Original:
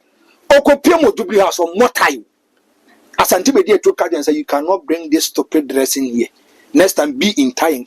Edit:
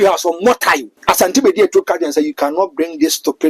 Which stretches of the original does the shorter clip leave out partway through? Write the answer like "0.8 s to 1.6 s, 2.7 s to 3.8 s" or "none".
2.2 s to 3.0 s